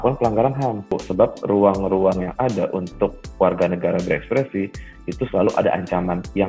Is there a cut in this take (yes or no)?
yes